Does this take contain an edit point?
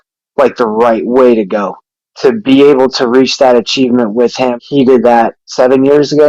yes; 3 cuts; at 1.8 s, 4.5 s, 5.4 s

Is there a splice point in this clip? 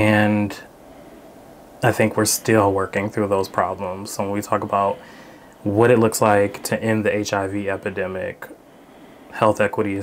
no; 0 cuts

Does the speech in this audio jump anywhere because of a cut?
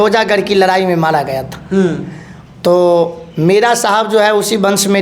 no; 0 cuts

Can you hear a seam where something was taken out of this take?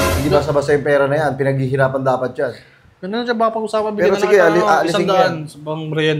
no; 0 cuts

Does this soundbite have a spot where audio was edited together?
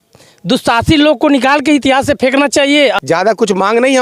yes; 1 cut; at 3.0 s

